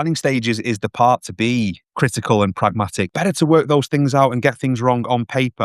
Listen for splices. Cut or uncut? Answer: cut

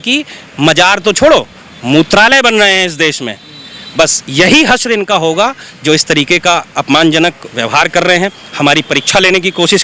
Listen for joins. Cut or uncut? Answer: uncut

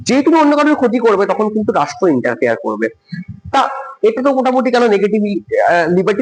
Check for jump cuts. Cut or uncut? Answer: uncut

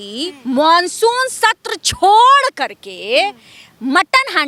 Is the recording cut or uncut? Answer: uncut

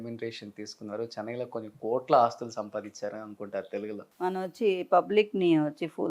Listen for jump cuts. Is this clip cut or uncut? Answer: cut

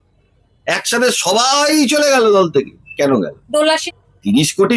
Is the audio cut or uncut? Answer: cut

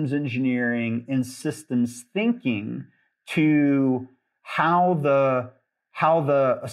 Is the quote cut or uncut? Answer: uncut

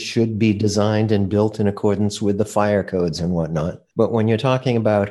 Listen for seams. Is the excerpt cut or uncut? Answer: cut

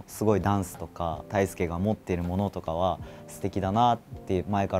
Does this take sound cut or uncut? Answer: cut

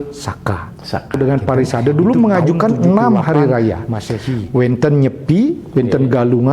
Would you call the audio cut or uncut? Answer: cut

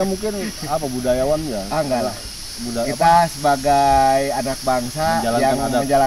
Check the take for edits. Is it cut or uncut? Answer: uncut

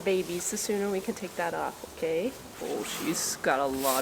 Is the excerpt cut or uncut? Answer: uncut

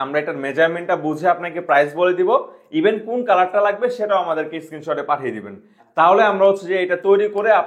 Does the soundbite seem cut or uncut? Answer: uncut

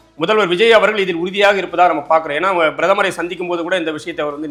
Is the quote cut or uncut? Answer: uncut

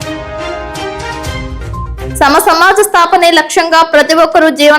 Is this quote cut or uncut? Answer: uncut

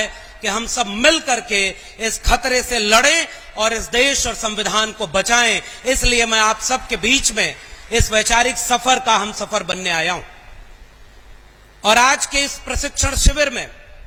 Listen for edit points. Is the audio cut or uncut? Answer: uncut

